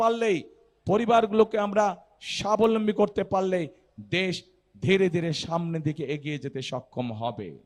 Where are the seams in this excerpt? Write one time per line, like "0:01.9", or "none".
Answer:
none